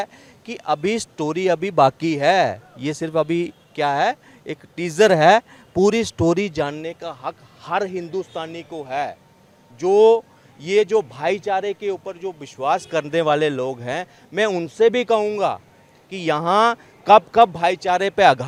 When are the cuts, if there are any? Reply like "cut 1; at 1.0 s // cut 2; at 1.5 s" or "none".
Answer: none